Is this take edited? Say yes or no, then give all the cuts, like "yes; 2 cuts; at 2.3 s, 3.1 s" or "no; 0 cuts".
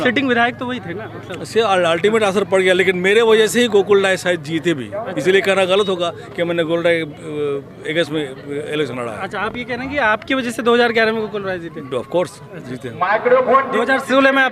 no; 0 cuts